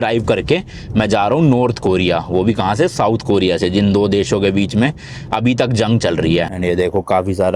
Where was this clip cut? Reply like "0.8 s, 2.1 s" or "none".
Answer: 6.5 s